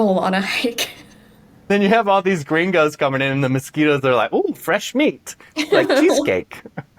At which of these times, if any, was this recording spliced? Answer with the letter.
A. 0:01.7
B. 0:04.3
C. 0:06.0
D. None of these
A